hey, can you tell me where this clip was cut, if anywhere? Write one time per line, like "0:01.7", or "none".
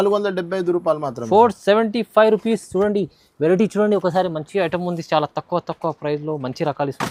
none